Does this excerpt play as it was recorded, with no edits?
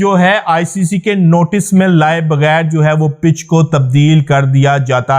yes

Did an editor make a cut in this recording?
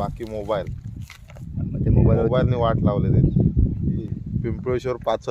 yes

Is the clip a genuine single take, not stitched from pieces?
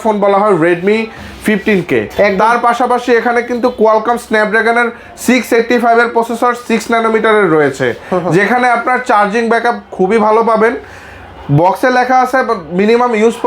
yes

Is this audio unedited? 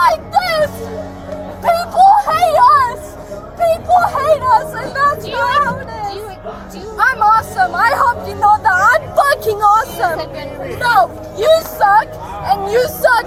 yes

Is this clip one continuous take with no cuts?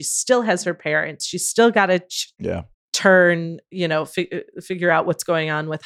yes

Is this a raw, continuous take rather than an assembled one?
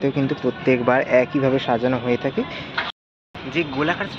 no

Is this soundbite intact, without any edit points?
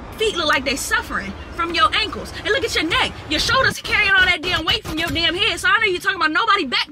yes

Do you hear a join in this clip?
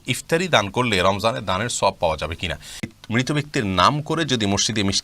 yes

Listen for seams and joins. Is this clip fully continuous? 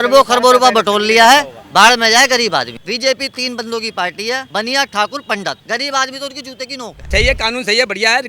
no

